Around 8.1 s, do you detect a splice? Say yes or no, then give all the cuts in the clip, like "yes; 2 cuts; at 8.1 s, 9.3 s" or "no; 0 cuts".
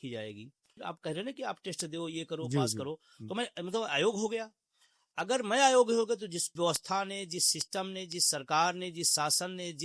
no; 2 cuts; at 0.8 s, 6.5 s